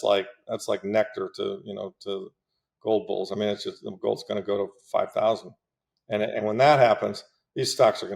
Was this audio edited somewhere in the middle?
no; 0 cuts

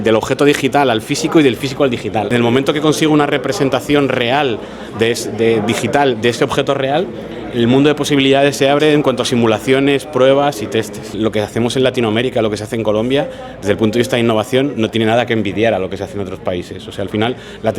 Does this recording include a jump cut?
yes; 2 cuts; at 2.3 s, 11.2 s

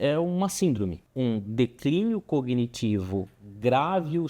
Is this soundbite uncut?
no; 1 cut; at 1.0 s

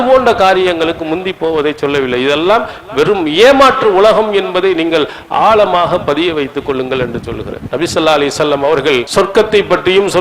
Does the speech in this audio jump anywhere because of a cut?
yes; 2 cuts; at 7.6 s, 9.1 s

